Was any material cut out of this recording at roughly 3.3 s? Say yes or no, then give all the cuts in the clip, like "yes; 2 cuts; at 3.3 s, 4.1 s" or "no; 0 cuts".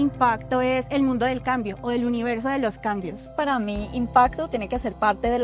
yes; 1 cut; at 3.3 s